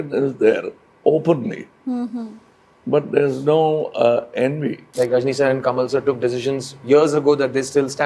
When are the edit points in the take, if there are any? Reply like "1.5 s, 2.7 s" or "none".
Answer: 4.9 s